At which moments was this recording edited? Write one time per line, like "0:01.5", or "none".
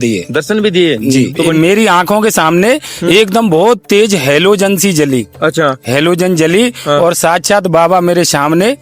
0:01.0